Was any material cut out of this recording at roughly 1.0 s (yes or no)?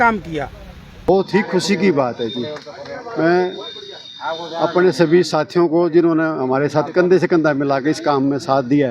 yes